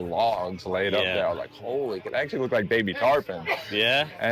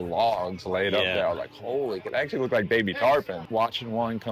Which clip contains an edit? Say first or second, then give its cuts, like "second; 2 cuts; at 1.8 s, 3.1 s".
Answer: second; 1 cut; at 3.4 s